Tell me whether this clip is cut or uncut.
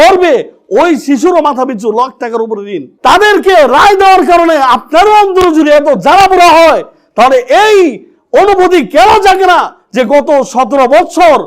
cut